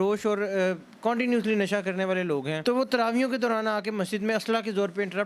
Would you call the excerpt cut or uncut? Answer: cut